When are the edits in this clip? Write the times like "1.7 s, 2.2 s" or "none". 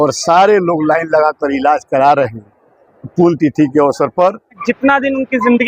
4.6 s